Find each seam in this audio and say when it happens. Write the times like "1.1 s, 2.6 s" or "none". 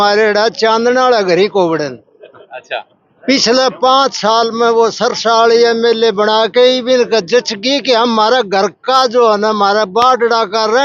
none